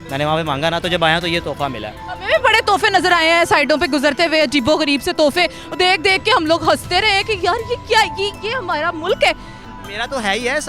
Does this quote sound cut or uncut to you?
cut